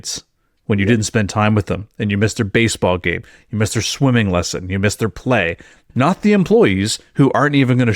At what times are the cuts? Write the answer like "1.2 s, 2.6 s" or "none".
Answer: 5.8 s